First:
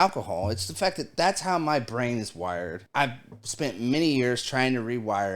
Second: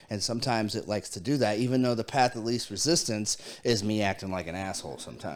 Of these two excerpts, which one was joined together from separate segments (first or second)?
first